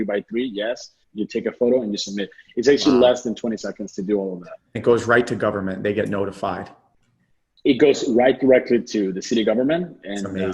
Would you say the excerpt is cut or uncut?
cut